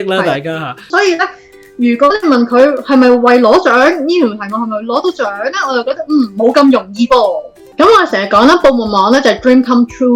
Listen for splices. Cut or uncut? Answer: cut